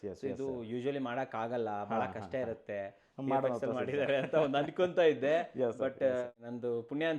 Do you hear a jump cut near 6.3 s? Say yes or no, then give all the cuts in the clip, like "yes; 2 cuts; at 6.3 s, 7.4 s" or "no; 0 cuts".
yes; 1 cut; at 6.3 s